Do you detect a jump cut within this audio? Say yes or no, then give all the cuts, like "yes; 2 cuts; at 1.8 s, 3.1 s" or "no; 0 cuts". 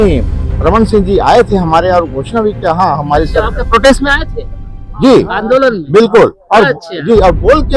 no; 0 cuts